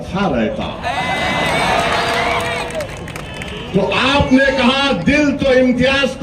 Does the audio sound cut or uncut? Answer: uncut